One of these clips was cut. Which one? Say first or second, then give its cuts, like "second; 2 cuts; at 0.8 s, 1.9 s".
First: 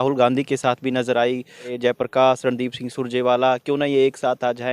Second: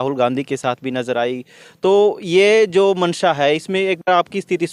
first; 1 cut; at 1.7 s